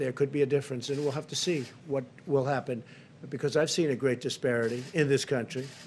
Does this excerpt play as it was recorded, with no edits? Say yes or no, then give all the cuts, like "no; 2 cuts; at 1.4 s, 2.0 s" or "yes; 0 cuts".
yes; 0 cuts